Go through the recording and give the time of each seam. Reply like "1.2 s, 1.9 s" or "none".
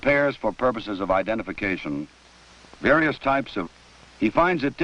none